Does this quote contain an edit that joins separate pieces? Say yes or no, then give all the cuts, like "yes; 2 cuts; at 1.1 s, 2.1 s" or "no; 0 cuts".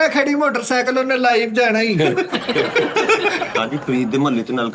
yes; 1 cut; at 3.6 s